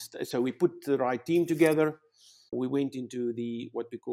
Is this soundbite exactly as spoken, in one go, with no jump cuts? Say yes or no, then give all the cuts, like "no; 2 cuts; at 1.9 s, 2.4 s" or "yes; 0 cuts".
no; 1 cut; at 2.5 s